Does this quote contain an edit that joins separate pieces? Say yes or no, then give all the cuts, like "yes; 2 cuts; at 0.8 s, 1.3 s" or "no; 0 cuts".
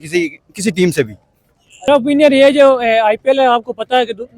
yes; 1 cut; at 1.8 s